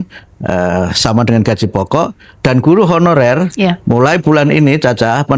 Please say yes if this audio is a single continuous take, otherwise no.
yes